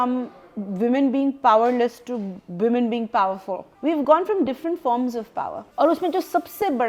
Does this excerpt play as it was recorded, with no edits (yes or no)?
no